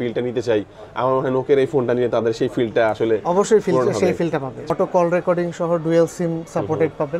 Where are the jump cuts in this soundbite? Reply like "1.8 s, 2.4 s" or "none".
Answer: 4.6 s

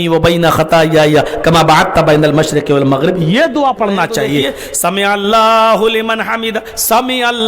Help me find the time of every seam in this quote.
4.5 s

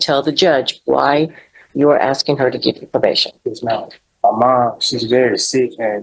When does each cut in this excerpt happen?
4.0 s

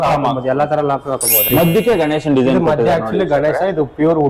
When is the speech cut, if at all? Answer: 1.5 s

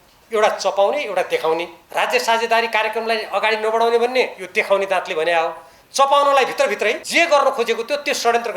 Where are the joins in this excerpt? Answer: 1.8 s, 7.0 s

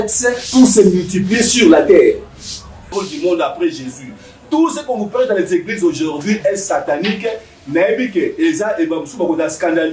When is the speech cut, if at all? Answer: 2.9 s

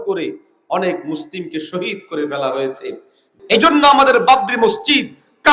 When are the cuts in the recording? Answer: 3.3 s

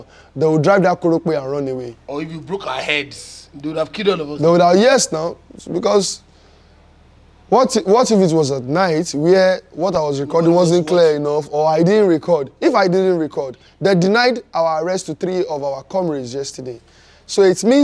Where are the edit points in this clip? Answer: none

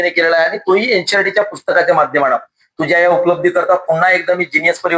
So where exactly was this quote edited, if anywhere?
none

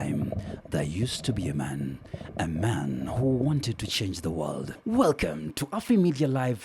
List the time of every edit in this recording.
4.7 s

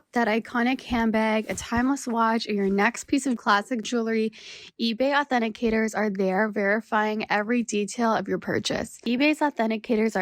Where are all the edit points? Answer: 8.9 s

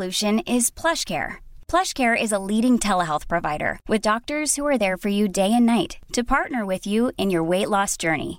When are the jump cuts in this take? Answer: none

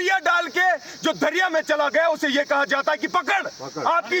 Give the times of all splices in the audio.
none

